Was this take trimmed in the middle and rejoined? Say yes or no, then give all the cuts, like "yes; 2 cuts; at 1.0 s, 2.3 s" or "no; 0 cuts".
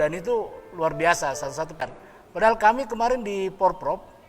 yes; 1 cut; at 1.9 s